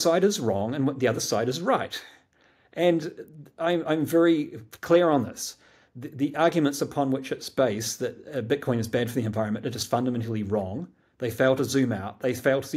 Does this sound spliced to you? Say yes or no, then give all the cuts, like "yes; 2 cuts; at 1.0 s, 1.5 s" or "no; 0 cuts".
no; 0 cuts